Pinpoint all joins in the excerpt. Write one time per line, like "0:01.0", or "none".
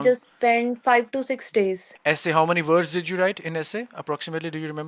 0:01.9